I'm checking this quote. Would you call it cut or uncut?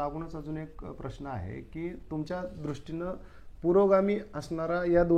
uncut